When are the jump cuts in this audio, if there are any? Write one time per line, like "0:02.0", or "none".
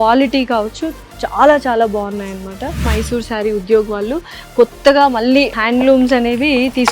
0:02.9
0:05.6